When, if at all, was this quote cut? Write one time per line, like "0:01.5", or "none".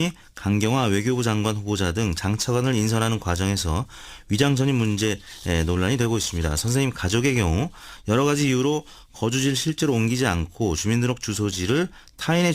0:02.8